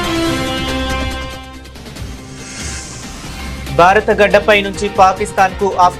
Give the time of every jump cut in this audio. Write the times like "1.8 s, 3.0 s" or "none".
1.0 s